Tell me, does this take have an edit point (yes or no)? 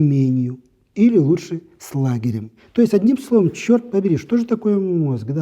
yes